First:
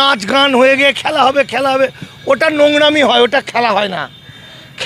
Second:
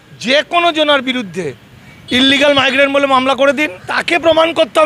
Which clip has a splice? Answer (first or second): second